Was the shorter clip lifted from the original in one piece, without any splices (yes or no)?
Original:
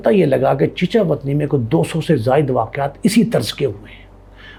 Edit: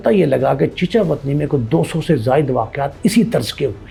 yes